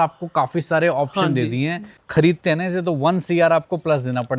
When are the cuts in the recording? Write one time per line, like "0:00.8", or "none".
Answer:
0:02.0